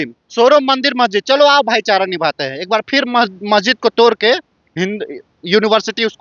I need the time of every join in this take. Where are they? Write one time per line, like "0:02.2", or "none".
none

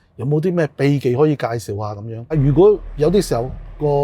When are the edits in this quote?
0:02.3

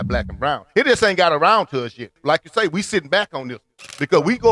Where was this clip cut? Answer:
0:02.1

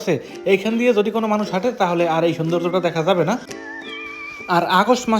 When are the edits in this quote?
0:03.6

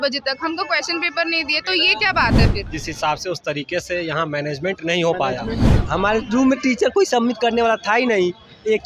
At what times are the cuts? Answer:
0:02.7
0:05.7

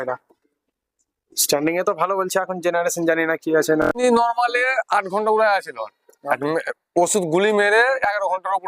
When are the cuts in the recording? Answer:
0:04.0

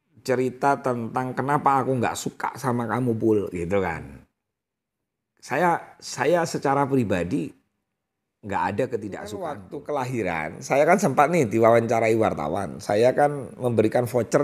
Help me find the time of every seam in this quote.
0:09.4

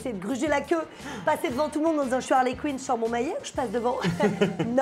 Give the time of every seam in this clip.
none

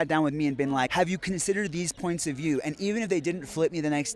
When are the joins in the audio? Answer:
0:00.9

